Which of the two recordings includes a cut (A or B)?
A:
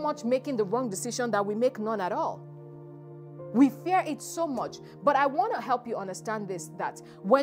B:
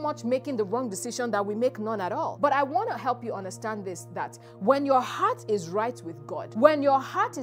B